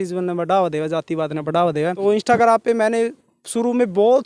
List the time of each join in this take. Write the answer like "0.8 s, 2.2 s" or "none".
2.0 s

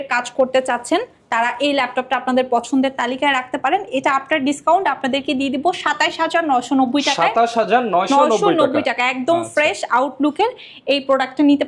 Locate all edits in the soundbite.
none

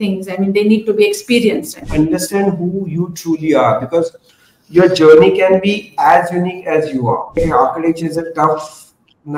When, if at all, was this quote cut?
1.8 s, 7.4 s

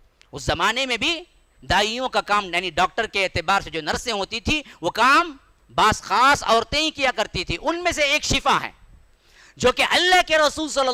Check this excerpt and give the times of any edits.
none

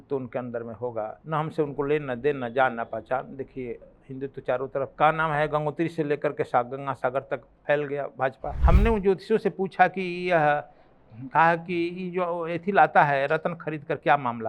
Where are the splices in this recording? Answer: 1.2 s, 4.9 s, 7.5 s, 8.5 s

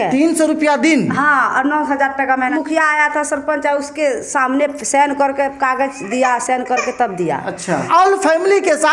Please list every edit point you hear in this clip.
2.5 s, 7.9 s

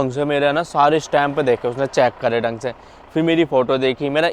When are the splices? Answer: none

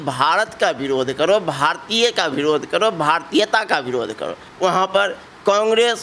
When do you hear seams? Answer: 4.5 s

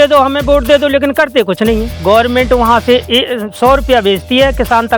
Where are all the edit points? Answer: 1.9 s

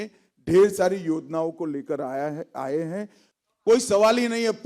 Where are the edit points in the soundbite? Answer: 3.2 s

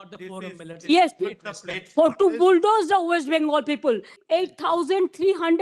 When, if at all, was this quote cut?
4.2 s

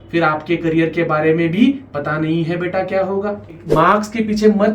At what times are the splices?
3.6 s

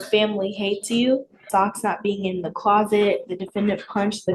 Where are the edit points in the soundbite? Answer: 1.4 s

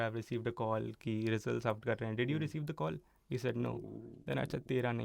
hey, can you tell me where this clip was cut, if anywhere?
none

